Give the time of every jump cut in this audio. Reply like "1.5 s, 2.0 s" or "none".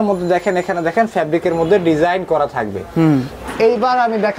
3.4 s